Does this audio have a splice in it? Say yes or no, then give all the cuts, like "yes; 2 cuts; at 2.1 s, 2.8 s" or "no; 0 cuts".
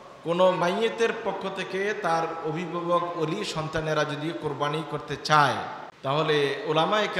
yes; 1 cut; at 5.8 s